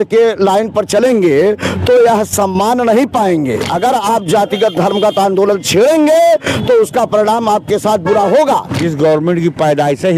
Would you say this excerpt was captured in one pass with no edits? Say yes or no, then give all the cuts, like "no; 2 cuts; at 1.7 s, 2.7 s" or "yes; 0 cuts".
no; 2 cuts; at 3.7 s, 8.8 s